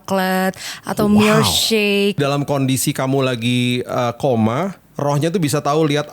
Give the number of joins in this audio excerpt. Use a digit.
2